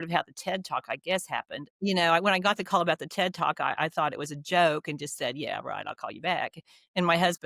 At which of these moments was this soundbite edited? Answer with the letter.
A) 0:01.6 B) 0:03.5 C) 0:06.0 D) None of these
A